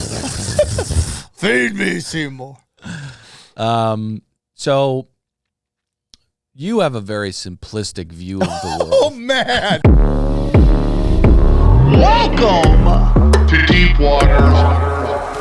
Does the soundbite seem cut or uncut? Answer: cut